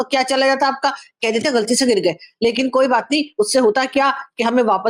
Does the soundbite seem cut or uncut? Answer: uncut